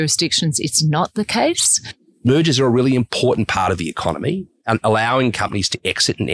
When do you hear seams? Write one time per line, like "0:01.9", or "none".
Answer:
0:02.2